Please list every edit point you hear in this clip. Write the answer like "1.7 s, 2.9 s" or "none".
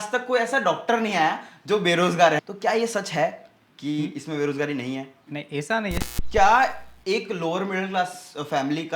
2.4 s, 6.0 s

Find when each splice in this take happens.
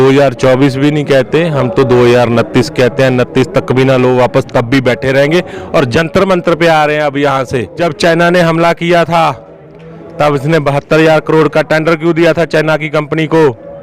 7.8 s

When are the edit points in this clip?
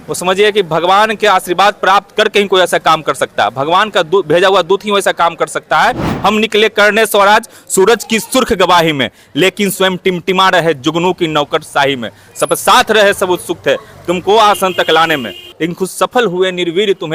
6.1 s, 15.5 s

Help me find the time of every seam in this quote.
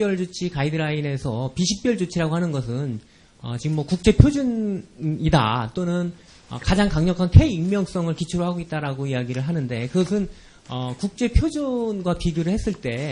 11.3 s

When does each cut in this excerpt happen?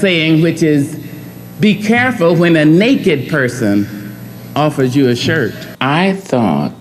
5.6 s

